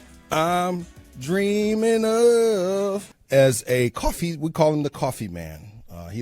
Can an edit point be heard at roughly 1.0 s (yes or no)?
no